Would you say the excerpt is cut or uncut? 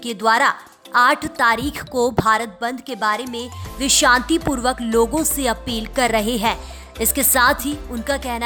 uncut